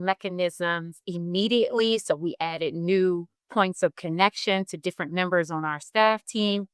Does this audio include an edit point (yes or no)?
yes